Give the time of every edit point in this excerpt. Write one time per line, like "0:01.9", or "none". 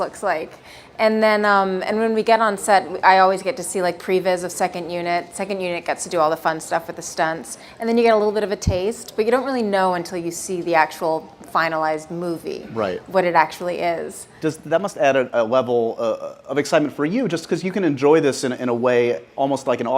0:04.9